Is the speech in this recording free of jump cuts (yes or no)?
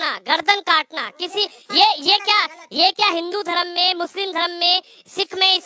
yes